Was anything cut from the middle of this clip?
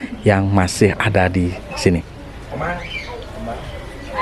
no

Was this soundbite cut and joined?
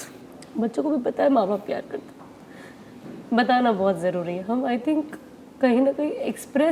no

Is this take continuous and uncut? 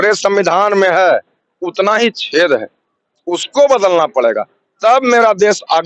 yes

